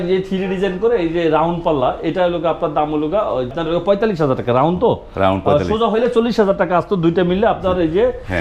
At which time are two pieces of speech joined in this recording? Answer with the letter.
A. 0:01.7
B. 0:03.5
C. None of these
B